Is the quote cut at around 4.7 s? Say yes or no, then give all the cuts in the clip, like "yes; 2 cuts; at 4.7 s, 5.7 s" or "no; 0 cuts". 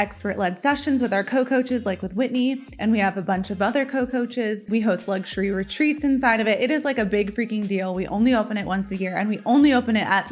yes; 1 cut; at 4.7 s